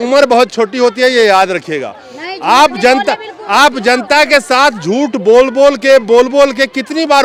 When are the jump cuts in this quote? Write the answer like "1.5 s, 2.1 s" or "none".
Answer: none